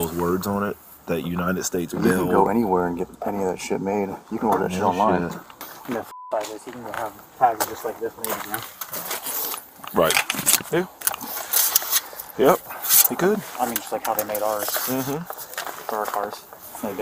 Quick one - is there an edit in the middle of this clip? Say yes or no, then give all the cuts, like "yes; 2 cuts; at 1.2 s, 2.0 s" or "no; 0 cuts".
no; 0 cuts